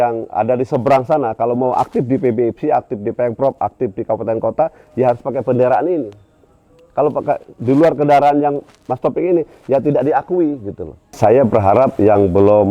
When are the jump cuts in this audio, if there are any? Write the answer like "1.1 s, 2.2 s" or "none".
11.2 s

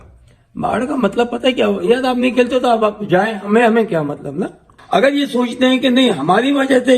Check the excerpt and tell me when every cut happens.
4.7 s

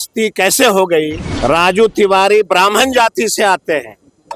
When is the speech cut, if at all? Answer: 1.2 s

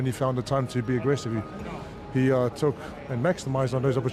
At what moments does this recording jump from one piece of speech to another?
none

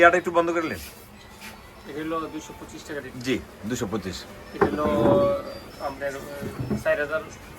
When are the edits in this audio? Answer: none

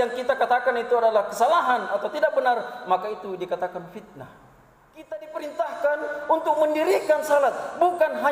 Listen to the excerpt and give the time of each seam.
5.2 s

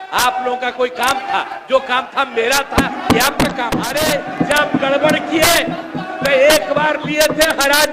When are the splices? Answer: 3.9 s

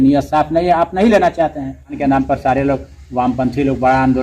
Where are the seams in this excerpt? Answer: 2.0 s

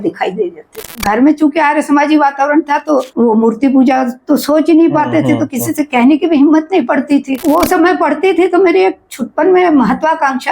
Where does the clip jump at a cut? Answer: 0.9 s, 7.3 s

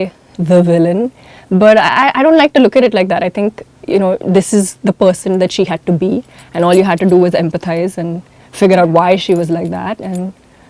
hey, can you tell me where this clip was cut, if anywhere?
none

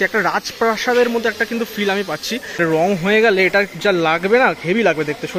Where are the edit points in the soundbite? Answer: 2.6 s

